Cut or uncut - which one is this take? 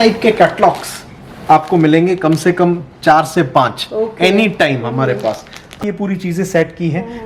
cut